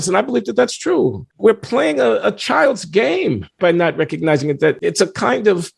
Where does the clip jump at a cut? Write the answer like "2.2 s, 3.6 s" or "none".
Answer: 1.3 s, 3.5 s, 4.8 s